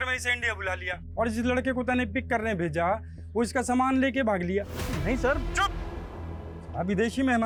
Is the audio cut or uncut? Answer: uncut